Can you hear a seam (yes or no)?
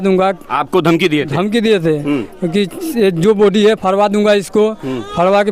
no